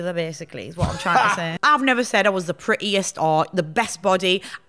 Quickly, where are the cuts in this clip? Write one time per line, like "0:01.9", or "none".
0:01.5